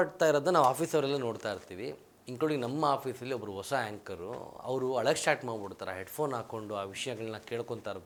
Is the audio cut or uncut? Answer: uncut